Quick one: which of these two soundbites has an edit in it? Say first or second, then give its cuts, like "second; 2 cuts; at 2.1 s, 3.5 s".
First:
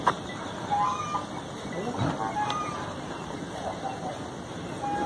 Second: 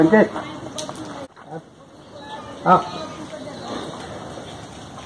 second; 1 cut; at 1.3 s